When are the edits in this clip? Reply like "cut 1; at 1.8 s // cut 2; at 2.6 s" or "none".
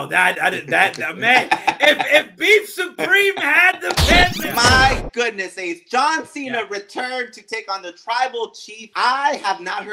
cut 1; at 4.4 s // cut 2; at 8.9 s